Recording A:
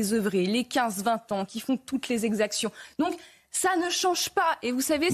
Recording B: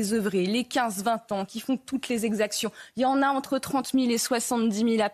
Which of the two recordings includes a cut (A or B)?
A